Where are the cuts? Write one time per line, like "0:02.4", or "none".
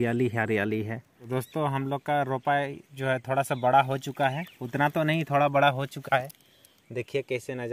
0:01.1